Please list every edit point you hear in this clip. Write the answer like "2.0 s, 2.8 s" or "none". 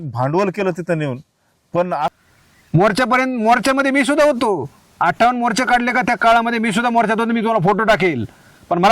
2.2 s